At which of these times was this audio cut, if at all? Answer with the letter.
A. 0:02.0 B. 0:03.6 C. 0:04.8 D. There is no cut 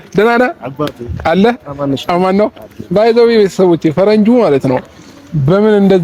D